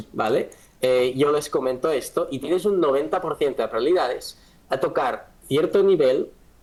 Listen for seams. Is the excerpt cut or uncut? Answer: uncut